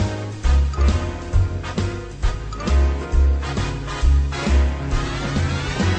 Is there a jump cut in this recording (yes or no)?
no